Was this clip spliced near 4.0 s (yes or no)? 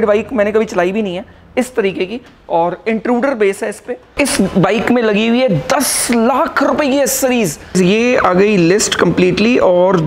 yes